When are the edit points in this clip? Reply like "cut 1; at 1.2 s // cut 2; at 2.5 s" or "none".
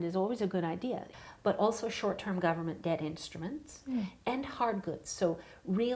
cut 1; at 1.1 s

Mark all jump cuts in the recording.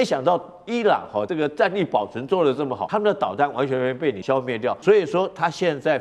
cut 1; at 1.3 s // cut 2; at 2.8 s // cut 3; at 4.3 s

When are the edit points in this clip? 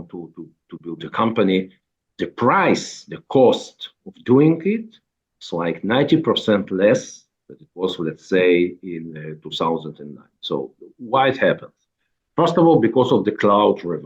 none

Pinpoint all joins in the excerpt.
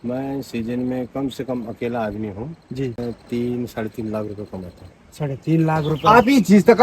cut 1; at 3.0 s // cut 2; at 5.9 s

